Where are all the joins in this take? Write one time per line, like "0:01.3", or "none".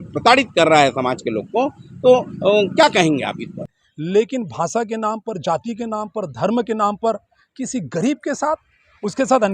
0:03.8